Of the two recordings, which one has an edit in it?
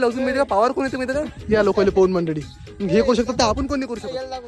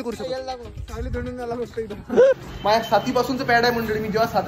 second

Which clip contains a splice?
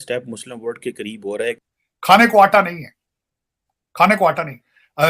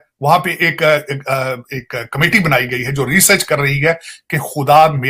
first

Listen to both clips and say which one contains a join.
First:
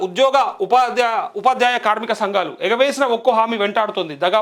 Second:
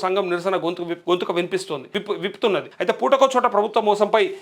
second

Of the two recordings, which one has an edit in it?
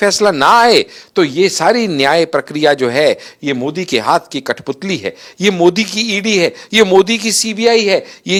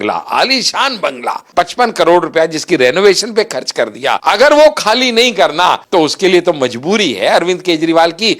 second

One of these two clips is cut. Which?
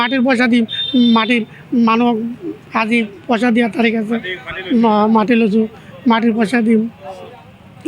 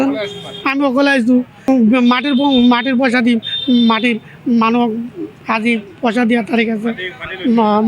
second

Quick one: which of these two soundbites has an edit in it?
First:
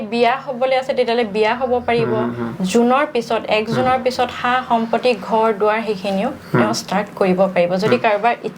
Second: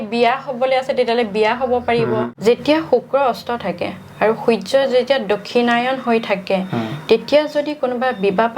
second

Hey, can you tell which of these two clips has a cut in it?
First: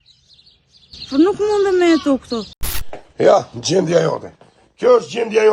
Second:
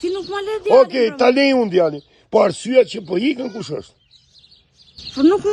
first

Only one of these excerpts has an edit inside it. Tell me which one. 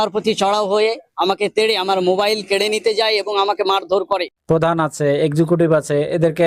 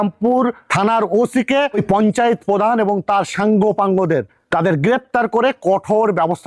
first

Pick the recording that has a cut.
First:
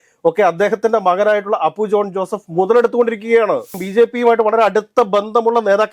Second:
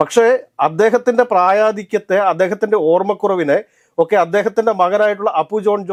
first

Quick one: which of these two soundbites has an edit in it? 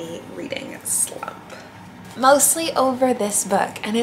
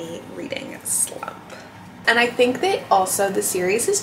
second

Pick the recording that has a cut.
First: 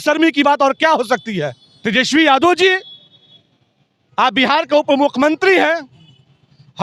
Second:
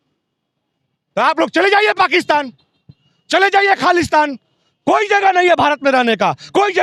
first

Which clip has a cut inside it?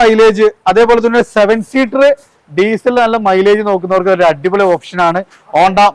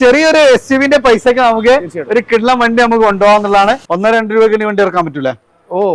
second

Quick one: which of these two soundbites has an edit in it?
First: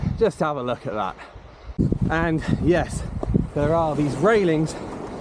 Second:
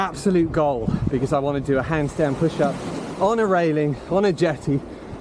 first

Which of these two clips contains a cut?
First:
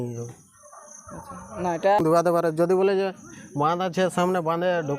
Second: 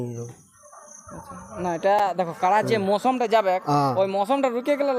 first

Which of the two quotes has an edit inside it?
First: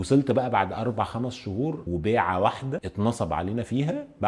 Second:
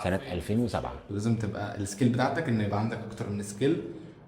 second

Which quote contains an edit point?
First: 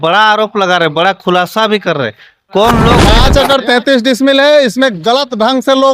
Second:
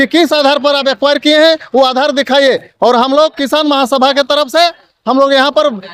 first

